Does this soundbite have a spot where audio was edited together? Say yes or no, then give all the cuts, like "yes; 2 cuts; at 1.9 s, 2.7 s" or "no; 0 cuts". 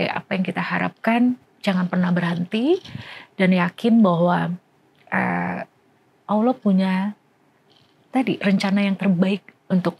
no; 0 cuts